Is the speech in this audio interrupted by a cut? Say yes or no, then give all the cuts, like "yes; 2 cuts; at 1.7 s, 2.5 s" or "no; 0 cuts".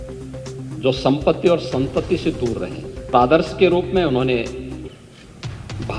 yes; 2 cuts; at 0.8 s, 3.1 s